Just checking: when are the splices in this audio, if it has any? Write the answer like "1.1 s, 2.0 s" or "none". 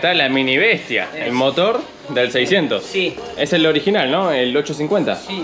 none